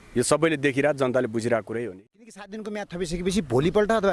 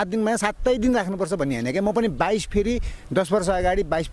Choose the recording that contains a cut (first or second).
first